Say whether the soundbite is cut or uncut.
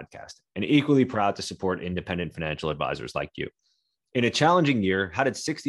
uncut